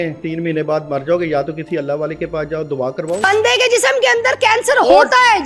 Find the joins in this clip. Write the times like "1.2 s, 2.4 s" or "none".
3.2 s